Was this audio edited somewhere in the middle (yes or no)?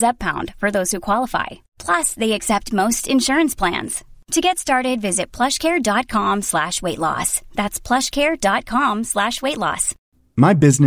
yes